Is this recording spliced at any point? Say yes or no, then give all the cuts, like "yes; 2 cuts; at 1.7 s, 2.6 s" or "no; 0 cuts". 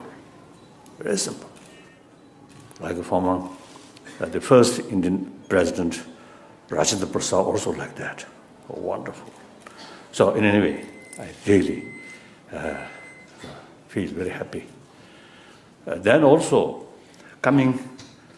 yes; 1 cut; at 7.6 s